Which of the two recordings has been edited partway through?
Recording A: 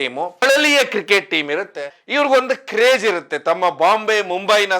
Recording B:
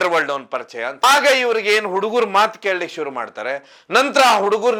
A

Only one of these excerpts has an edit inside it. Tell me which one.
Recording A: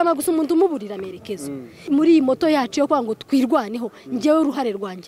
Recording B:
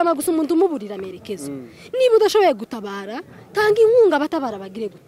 A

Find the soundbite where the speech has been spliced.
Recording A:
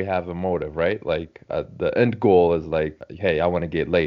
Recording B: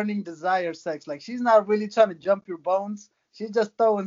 A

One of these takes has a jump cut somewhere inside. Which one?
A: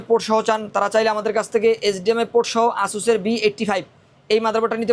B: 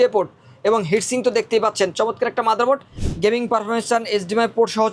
B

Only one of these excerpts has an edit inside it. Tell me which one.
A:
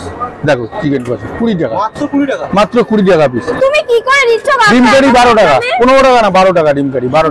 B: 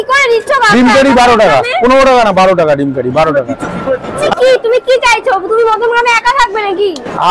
B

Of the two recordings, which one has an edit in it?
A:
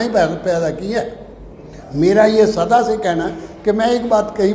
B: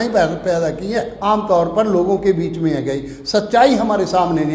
B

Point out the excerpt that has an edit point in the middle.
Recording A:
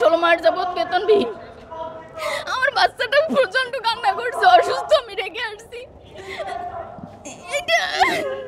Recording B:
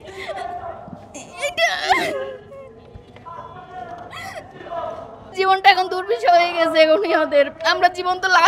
B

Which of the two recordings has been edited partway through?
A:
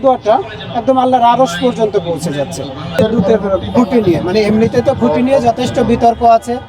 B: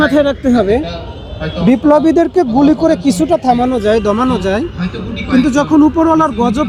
A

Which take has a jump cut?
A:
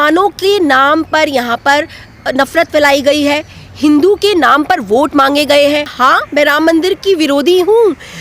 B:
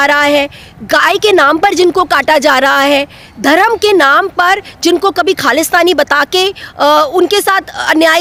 A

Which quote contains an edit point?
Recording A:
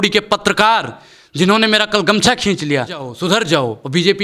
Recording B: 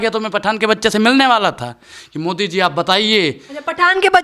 A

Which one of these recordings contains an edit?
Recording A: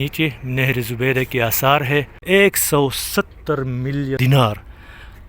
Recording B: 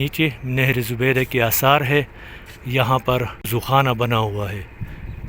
A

